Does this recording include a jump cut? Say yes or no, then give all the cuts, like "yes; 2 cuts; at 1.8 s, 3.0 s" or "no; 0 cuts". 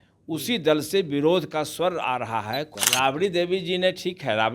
yes; 1 cut; at 2.7 s